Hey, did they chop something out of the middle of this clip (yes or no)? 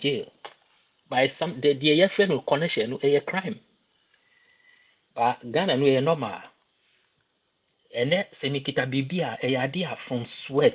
no